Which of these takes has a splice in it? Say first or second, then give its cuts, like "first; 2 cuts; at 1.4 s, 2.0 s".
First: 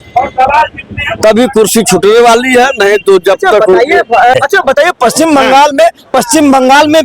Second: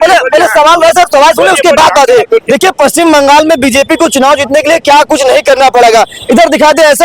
first; 1 cut; at 4.3 s